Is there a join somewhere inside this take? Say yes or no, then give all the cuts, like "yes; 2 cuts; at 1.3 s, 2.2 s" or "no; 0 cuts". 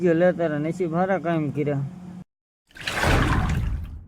no; 0 cuts